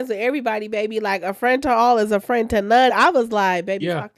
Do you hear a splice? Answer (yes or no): yes